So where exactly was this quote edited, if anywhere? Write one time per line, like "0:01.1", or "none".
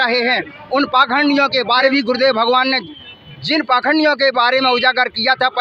0:01.9